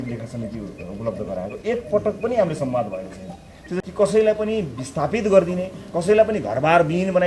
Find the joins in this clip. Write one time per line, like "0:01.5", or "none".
0:03.8